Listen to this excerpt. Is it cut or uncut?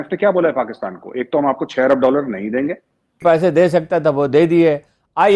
cut